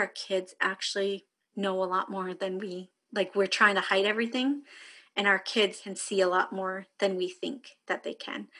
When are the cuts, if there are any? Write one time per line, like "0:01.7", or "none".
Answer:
0:01.4
0:05.9